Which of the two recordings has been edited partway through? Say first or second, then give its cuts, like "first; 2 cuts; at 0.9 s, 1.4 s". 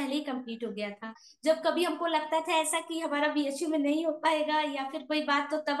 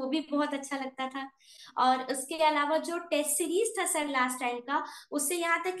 first; 1 cut; at 1.2 s